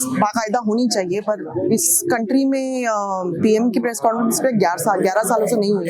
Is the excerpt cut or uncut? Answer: uncut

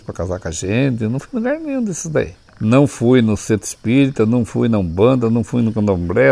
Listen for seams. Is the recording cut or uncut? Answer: cut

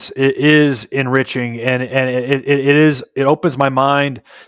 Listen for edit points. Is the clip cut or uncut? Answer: uncut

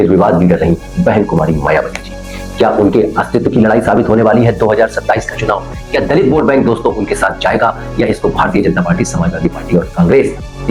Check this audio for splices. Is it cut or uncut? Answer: uncut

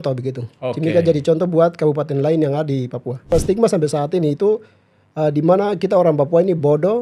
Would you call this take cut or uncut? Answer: cut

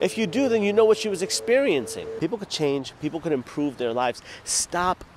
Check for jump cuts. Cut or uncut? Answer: cut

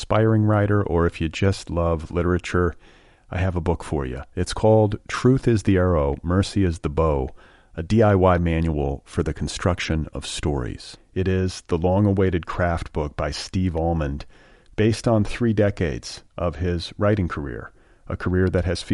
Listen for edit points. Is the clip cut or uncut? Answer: uncut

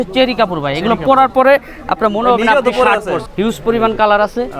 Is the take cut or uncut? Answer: cut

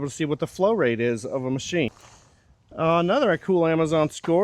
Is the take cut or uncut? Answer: cut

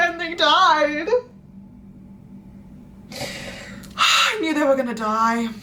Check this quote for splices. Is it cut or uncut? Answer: uncut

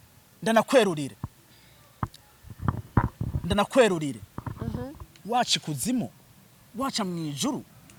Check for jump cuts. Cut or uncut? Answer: uncut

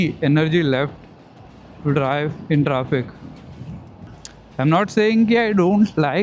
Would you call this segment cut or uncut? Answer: uncut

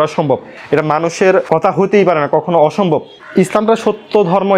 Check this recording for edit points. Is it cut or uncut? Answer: uncut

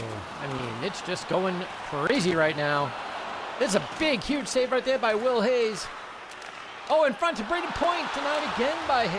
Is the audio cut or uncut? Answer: uncut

